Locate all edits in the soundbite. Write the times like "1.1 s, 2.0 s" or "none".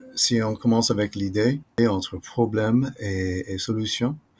1.8 s